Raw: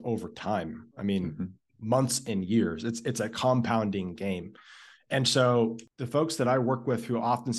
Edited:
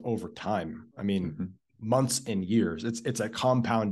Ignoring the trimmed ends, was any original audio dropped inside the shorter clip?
no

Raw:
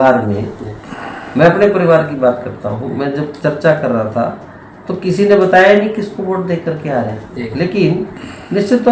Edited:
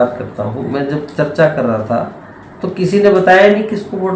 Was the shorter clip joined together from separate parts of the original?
no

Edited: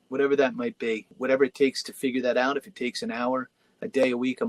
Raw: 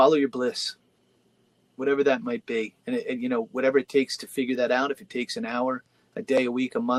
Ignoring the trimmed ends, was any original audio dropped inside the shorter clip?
yes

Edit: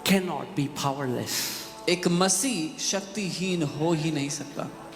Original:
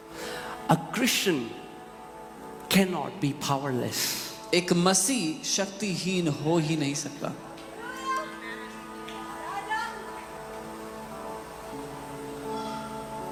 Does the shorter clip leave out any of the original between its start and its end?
no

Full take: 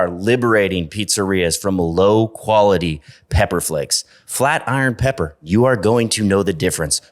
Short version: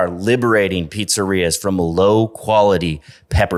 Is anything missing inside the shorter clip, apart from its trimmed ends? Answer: no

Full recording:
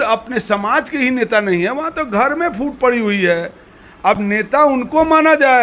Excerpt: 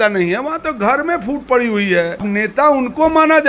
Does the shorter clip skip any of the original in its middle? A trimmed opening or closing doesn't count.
yes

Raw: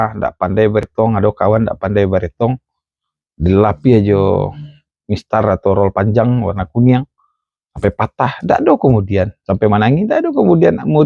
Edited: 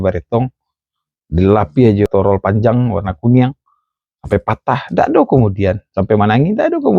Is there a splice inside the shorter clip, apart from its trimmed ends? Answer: yes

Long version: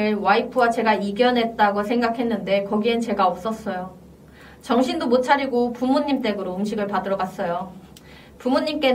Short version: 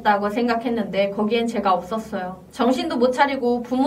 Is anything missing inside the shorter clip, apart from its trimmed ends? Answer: yes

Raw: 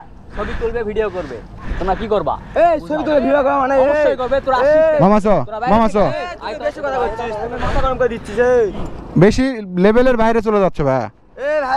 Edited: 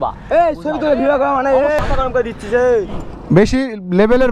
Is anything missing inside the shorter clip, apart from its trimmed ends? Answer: yes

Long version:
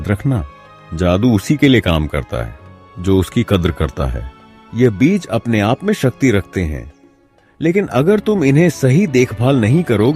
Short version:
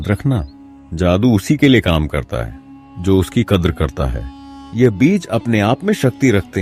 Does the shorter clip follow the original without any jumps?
yes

